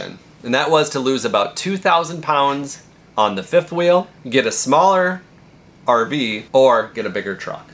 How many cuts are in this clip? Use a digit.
2